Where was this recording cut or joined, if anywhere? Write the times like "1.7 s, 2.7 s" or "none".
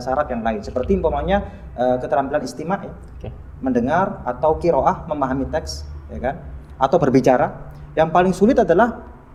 none